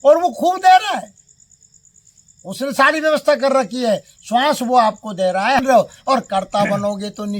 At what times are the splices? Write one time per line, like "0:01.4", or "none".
0:05.6

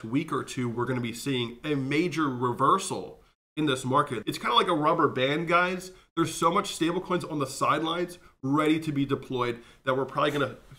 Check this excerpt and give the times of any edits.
0:04.2

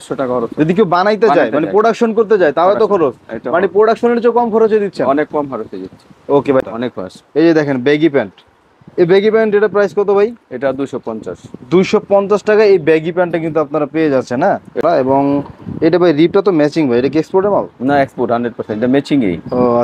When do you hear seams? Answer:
0:06.7
0:14.8

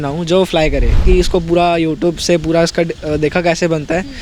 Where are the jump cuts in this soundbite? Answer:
0:01.0

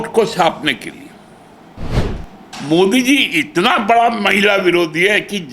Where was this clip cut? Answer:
0:01.9

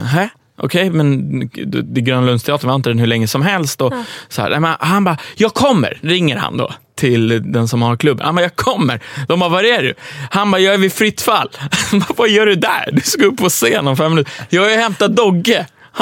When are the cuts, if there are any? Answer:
none

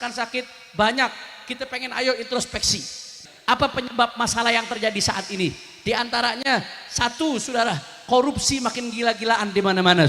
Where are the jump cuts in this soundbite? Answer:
0:03.1

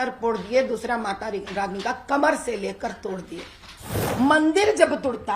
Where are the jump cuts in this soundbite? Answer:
0:04.0

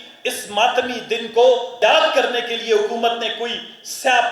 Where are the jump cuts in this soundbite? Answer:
0:01.8

